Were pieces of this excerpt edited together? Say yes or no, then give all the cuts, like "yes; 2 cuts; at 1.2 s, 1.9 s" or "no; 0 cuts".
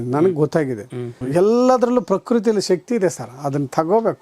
yes; 1 cut; at 1.2 s